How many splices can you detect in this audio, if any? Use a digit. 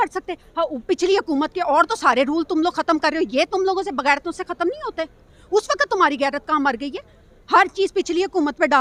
0